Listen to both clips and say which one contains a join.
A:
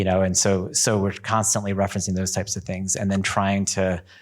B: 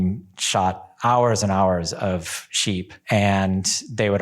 B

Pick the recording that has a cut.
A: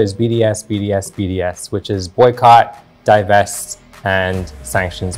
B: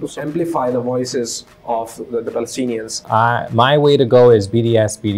B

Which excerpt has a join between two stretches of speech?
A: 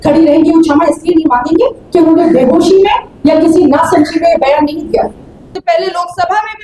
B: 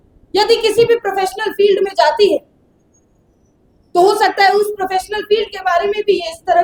A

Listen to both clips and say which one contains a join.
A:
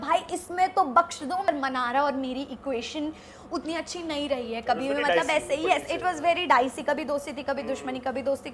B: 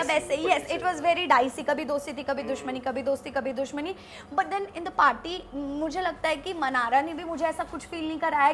A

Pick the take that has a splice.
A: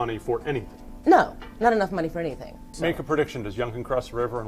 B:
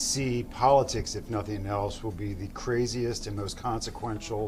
A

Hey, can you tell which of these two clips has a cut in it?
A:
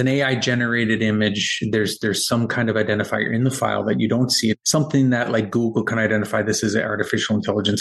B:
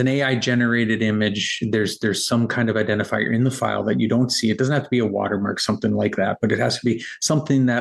A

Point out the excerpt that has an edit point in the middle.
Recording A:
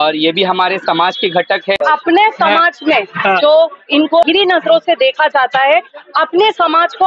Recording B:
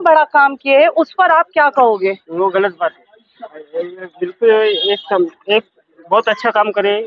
A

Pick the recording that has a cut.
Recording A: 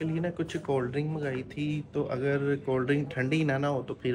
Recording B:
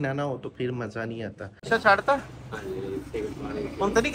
B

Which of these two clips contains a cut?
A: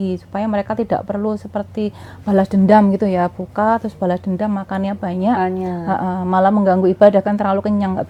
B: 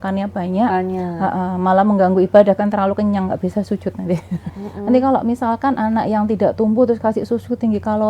B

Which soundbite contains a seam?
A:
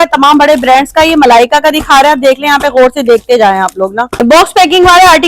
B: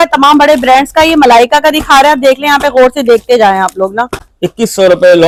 A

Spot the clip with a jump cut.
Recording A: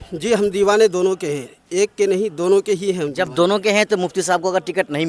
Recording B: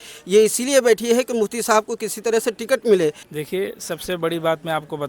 B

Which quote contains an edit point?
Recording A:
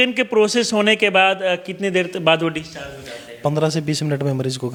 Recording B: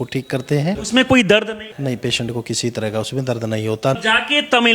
B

